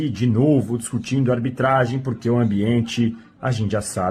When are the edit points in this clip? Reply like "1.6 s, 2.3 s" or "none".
none